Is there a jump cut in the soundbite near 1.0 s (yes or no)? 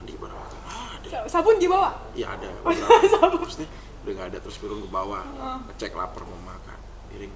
no